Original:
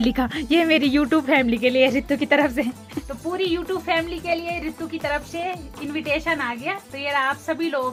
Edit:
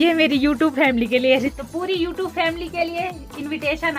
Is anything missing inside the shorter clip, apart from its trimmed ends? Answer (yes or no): yes